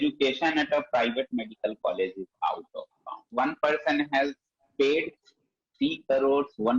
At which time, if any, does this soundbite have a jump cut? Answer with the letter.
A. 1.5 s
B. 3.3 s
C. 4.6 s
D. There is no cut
B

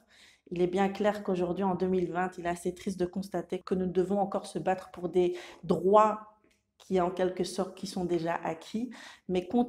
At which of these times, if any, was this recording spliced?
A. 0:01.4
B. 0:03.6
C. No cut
B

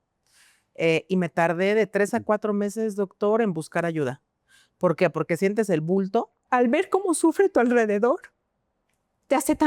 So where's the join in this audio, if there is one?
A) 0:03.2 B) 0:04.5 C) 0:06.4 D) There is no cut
C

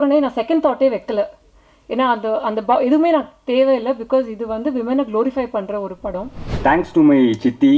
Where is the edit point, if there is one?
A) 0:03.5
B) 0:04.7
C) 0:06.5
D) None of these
C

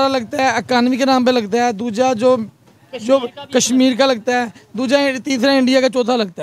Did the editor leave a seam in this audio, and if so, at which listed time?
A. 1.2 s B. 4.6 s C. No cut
C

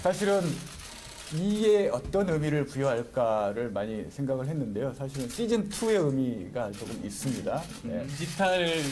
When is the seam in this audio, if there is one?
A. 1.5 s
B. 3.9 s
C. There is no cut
A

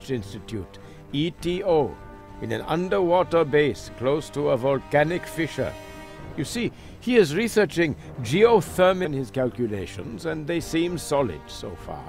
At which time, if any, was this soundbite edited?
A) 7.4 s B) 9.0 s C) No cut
C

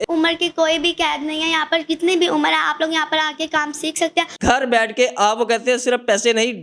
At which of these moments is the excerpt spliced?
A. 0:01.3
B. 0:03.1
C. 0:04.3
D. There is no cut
C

